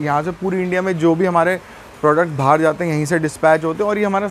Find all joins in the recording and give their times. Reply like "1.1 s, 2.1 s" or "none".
none

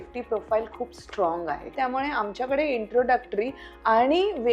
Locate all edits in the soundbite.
1.7 s

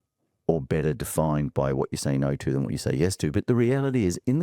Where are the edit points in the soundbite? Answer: none

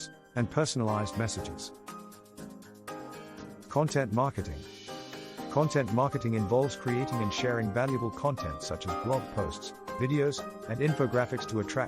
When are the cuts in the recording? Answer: none

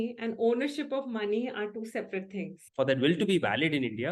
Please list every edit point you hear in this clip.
2.6 s

